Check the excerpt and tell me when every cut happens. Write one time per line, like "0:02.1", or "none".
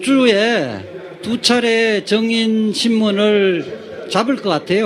0:03.0